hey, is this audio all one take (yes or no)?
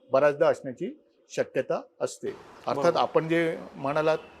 yes